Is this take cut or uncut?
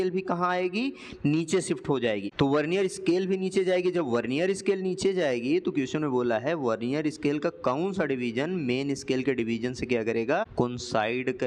cut